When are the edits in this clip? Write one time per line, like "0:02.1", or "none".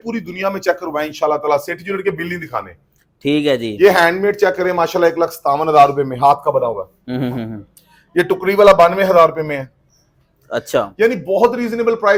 none